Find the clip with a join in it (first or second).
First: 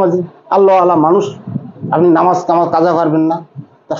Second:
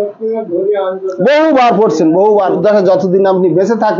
second